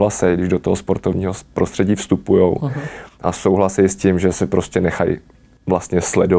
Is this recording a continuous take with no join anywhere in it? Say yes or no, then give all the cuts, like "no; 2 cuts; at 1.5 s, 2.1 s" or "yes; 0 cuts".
yes; 0 cuts